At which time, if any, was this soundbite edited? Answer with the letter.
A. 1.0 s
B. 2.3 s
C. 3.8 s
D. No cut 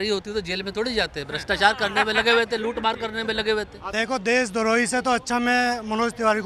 C